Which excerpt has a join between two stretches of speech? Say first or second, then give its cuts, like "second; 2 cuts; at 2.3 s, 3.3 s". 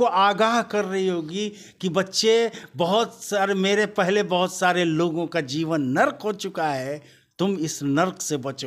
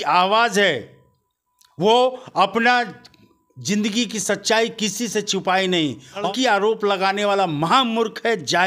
second; 1 cut; at 6.2 s